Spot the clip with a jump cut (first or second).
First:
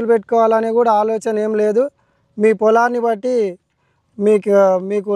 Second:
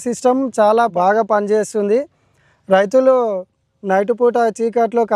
second